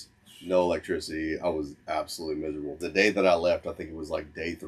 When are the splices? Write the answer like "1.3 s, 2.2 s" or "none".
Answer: 2.8 s